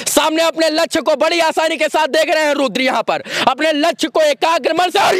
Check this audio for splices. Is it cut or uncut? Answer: uncut